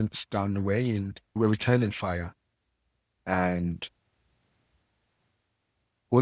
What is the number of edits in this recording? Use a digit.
1